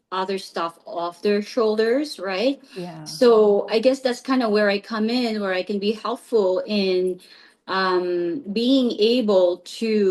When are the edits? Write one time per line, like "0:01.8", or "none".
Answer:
none